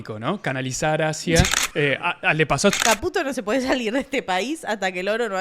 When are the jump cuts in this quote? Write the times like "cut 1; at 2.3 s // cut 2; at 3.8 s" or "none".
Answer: cut 1; at 2.7 s